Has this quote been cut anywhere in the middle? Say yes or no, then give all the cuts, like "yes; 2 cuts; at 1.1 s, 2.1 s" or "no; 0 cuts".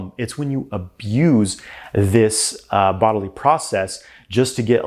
no; 0 cuts